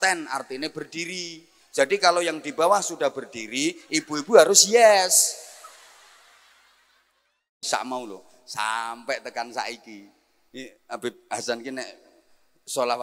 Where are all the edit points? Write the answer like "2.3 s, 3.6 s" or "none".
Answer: 7.6 s